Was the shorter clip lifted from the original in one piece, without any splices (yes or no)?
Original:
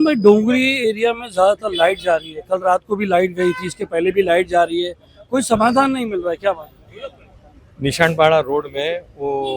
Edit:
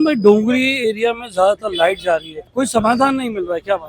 no